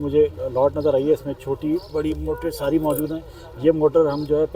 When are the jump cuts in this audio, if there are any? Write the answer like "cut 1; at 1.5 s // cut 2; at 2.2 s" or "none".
none